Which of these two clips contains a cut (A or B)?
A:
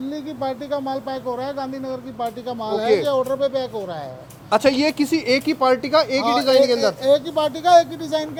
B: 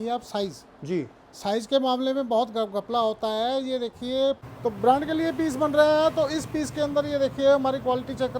B